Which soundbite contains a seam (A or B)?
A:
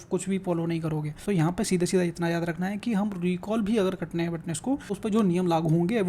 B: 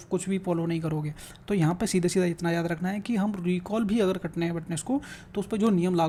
A